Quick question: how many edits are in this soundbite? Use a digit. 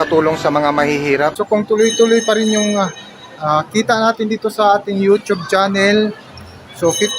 1